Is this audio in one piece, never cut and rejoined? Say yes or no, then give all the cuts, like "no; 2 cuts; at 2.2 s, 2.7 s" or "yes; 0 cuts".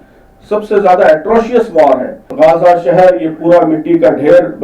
no; 1 cut; at 2.3 s